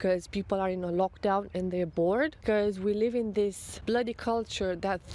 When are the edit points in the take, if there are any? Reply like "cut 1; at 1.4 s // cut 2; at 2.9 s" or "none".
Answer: cut 1; at 2.4 s